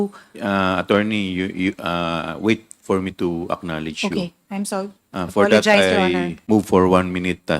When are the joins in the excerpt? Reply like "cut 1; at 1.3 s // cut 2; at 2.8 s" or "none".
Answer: cut 1; at 6.3 s